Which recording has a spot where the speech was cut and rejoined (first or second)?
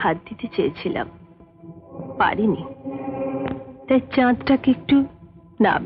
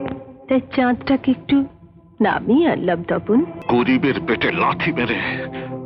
second